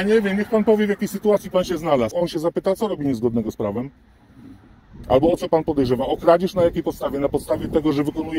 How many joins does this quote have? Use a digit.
1